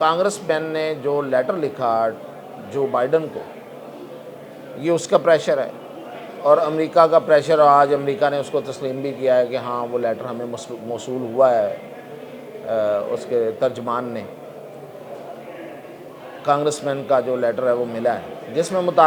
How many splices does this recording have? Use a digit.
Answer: 0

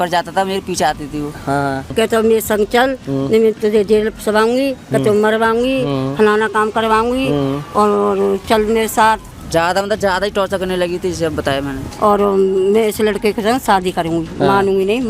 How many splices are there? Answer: 3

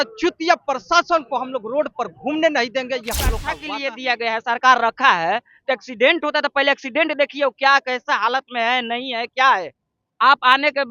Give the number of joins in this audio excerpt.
1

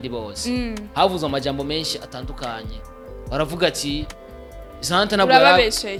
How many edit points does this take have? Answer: 0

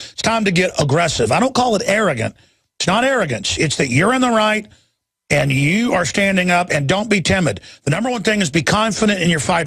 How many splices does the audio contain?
1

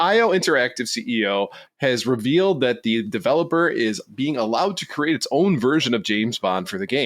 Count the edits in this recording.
1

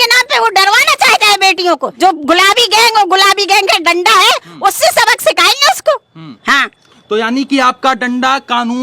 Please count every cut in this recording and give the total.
1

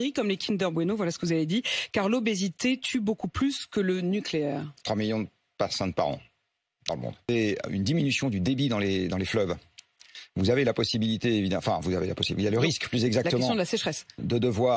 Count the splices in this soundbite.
1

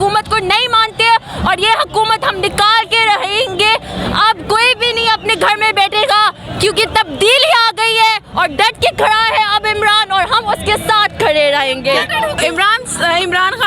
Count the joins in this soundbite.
1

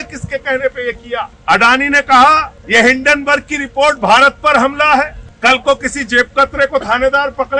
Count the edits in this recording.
3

